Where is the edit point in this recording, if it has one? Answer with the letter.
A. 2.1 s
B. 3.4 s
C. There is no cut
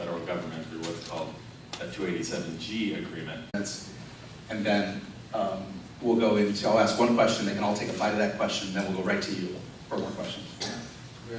C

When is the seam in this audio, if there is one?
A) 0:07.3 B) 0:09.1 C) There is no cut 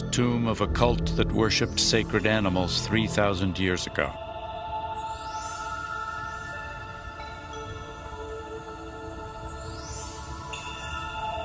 C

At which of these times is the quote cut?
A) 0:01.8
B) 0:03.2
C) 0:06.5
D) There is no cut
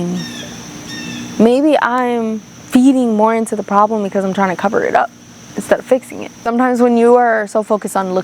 C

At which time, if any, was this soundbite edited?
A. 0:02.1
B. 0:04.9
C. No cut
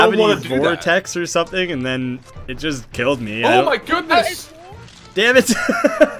B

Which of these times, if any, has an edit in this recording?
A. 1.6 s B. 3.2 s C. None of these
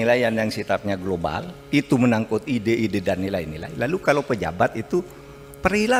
C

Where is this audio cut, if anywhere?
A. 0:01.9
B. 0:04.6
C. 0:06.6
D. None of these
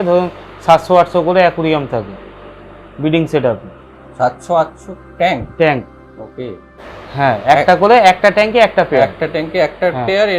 C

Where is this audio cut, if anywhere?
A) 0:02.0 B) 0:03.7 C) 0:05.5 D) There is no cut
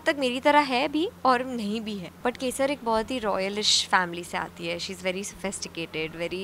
A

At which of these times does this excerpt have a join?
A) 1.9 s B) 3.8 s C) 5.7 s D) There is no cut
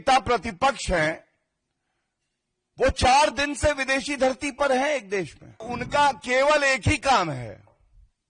C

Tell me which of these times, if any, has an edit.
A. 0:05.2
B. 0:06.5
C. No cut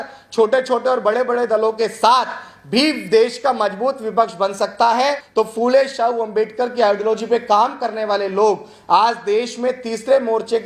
A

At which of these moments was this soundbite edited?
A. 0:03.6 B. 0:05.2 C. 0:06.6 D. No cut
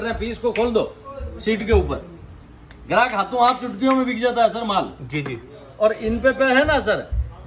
D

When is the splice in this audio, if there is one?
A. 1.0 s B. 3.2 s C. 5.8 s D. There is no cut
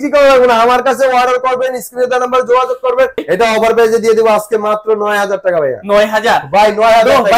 B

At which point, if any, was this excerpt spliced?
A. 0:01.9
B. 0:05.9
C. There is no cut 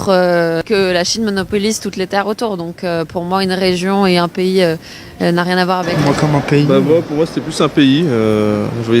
B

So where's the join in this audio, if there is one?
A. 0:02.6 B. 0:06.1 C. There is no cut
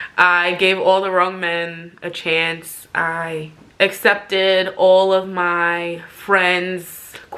C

